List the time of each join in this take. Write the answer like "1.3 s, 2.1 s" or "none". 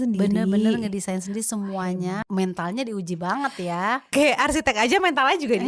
2.2 s, 4.1 s